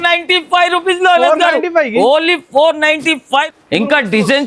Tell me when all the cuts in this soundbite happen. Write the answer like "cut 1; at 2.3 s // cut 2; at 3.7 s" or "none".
cut 1; at 3.5 s